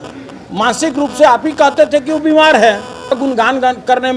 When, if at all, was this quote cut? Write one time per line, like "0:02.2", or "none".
0:03.2